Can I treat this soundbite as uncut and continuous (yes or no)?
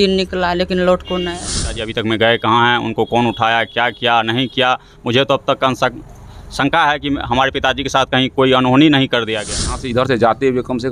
no